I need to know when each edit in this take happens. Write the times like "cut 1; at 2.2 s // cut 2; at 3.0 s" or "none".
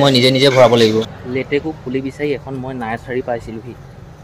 cut 1; at 1.2 s